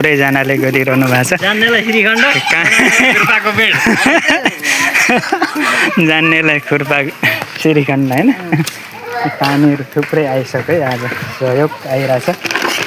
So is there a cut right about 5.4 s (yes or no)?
no